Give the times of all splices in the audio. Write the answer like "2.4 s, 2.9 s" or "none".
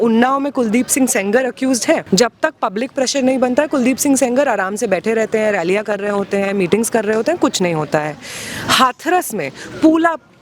2.0 s